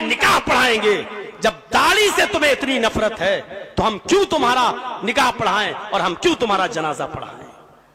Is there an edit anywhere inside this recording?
no; 0 cuts

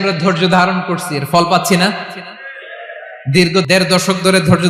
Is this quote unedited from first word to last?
yes; 0 cuts

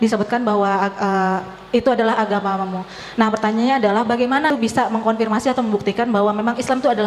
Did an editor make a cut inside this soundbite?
yes; 1 cut; at 4.5 s

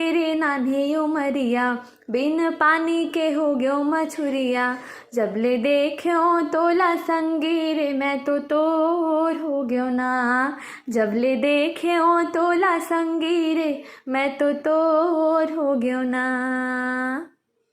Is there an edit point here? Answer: no; 0 cuts

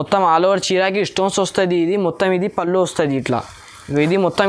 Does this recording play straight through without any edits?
yes; 0 cuts

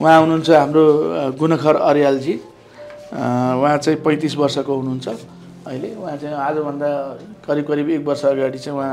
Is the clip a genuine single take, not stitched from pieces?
yes; 0 cuts

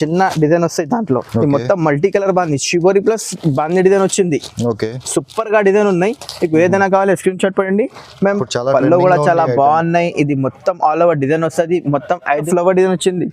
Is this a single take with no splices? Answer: no; 3 cuts; at 1.3 s, 8.4 s, 12.5 s

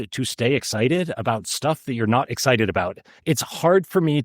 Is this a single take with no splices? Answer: no; 1 cut; at 3.1 s

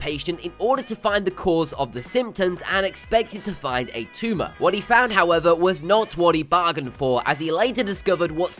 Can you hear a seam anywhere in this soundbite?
yes; 1 cut; at 1.0 s

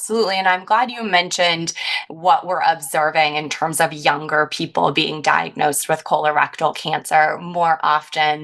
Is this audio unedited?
yes; 0 cuts

